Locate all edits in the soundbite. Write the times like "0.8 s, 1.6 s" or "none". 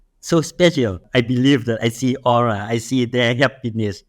1.0 s